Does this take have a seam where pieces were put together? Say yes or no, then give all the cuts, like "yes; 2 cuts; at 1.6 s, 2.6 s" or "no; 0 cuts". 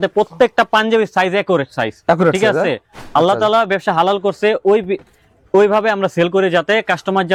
no; 0 cuts